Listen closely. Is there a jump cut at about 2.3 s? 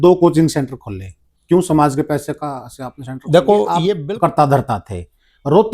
no; 1 cut; at 3.9 s

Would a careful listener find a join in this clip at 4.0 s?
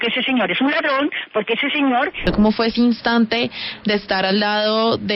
no; 1 cut; at 2.3 s

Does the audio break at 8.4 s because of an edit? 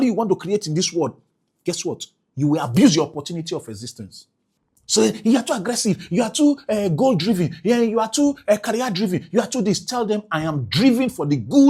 no; 0 cuts

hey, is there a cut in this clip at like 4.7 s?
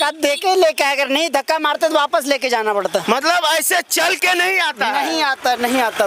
no; 0 cuts

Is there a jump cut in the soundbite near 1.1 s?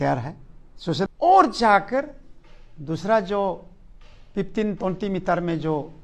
yes; 1 cut; at 1.1 s

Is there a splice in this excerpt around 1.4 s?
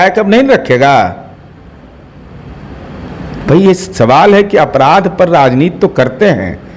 no; 0 cuts

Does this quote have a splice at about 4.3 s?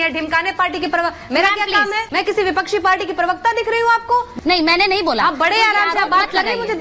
yes; 2 cuts; at 2.0 s, 4.3 s

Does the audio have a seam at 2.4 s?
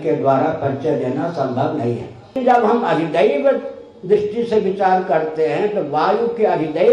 yes; 1 cut; at 2.4 s

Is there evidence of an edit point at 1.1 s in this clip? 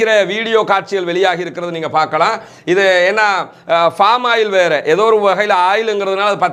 no; 0 cuts

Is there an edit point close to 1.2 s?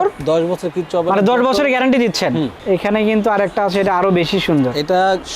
no; 1 cut; at 2.6 s

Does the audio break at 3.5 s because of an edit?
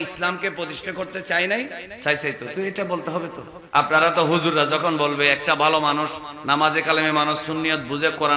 yes; 2 cuts; at 1.8 s, 3.5 s

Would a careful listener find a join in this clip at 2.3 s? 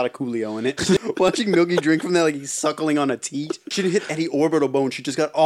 no; 2 cuts; at 1.0 s, 3.6 s

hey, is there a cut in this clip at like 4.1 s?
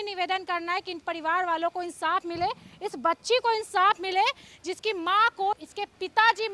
no; 1 cut; at 5.6 s

